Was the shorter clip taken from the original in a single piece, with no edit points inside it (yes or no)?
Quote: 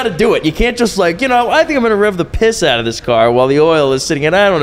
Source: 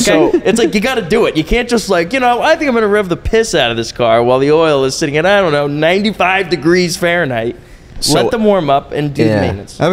yes